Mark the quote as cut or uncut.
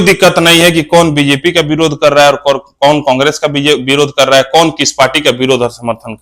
uncut